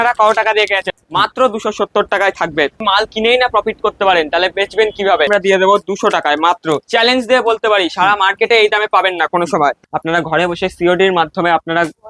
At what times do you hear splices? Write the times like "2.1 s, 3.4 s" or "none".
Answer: 1.0 s, 2.8 s, 5.3 s, 6.9 s, 9.9 s